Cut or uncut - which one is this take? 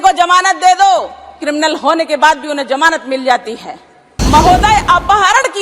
cut